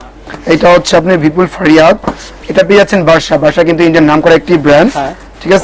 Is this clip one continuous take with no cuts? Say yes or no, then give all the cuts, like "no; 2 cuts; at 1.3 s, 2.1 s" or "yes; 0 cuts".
yes; 0 cuts